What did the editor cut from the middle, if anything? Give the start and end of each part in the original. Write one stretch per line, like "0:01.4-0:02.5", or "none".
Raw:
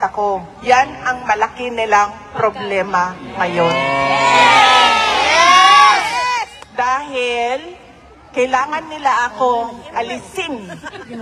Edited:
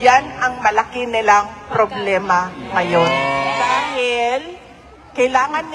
0:04.3-0:06.8